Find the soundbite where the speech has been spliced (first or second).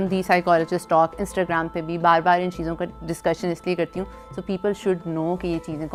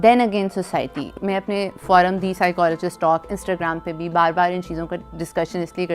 second